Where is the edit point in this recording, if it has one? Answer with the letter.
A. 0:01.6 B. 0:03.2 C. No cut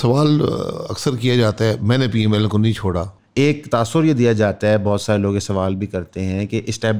B